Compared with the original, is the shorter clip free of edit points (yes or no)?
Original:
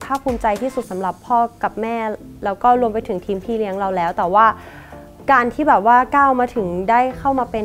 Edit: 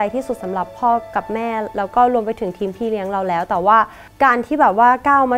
no